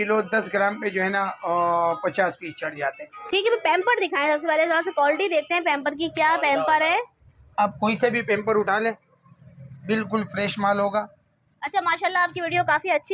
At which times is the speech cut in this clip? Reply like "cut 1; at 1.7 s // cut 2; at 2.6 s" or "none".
none